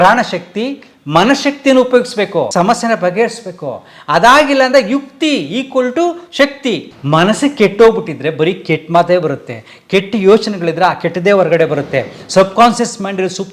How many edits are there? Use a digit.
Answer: 2